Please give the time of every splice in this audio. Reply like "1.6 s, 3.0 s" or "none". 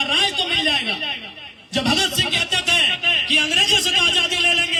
none